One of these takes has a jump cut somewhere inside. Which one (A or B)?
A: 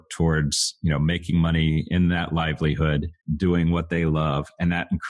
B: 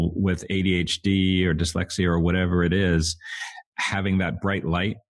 A